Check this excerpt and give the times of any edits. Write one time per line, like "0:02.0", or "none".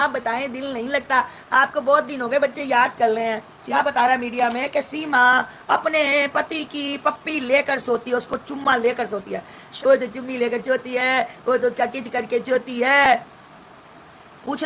0:03.6
0:09.7